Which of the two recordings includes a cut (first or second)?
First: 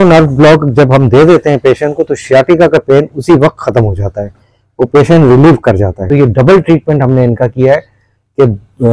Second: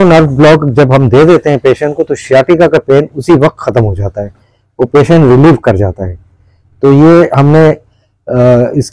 first